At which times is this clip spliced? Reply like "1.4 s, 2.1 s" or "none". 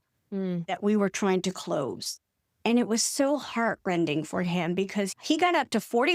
5.1 s